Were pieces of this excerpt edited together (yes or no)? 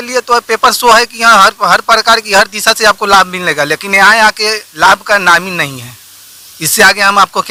no